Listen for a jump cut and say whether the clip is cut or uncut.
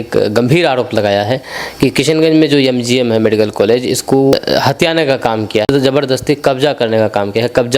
cut